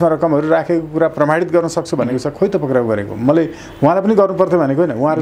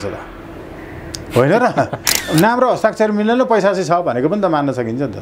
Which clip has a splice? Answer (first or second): second